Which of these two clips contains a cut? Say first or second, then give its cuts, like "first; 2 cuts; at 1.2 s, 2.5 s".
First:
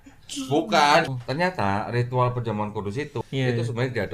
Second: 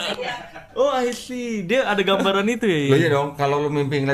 first; 2 cuts; at 1.1 s, 3.2 s